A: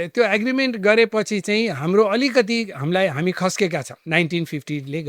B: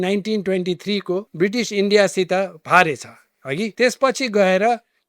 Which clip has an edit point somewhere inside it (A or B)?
B